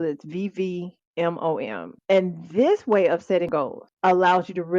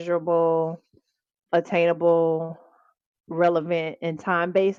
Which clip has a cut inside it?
first; 3 cuts; at 1.0 s, 1.9 s, 3.5 s

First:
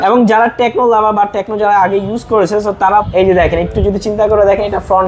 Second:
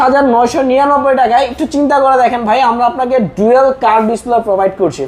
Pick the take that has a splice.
first; 1 cut; at 3.1 s

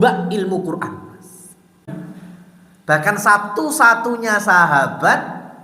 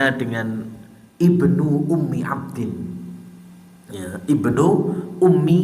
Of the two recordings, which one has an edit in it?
first; 1 cut; at 1.9 s

